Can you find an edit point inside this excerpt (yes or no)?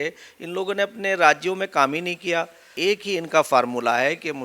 yes